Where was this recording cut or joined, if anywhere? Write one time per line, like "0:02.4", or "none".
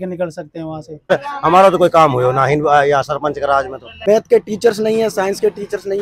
0:01.1
0:03.8